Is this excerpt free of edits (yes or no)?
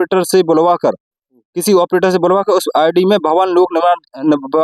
yes